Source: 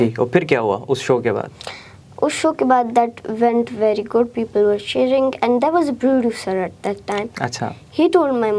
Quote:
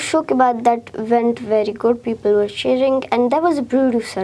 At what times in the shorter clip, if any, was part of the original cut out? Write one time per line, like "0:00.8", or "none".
none